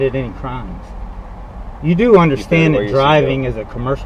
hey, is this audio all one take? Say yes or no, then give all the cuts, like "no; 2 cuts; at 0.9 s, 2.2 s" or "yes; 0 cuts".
yes; 0 cuts